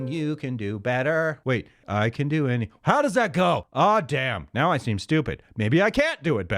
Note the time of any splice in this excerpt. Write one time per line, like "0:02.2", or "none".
0:01.5
0:03.7